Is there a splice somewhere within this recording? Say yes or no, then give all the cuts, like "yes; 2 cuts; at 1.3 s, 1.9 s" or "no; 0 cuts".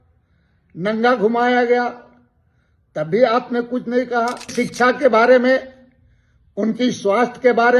yes; 1 cut; at 4.5 s